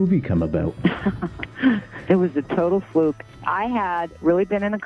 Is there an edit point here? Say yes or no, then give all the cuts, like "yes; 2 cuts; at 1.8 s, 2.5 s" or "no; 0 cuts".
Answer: yes; 1 cut; at 3.3 s